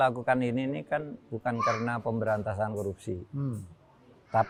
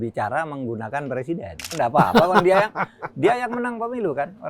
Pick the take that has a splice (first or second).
second